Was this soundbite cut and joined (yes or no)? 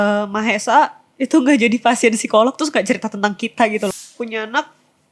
yes